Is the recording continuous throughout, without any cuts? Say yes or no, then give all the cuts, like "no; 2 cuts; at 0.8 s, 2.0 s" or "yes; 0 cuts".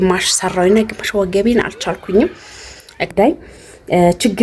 no; 1 cut; at 3.1 s